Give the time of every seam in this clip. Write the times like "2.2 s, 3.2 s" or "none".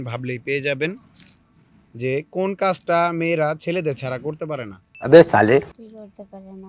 none